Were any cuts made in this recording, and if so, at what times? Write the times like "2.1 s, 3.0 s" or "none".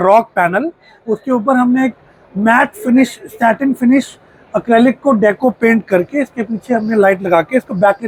none